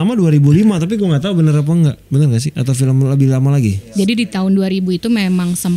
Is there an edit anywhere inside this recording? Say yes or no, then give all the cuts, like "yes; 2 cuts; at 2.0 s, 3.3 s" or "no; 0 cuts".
yes; 1 cut; at 3.8 s